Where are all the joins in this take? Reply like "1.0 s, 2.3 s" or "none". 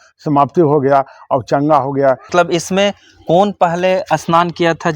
2.3 s